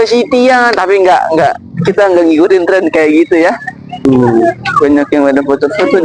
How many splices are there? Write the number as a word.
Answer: one